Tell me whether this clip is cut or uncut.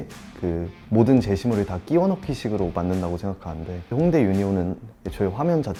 uncut